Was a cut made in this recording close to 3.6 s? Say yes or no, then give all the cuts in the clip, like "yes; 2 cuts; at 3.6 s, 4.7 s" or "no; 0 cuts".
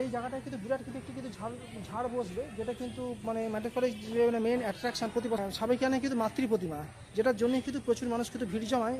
no; 1 cut; at 5.4 s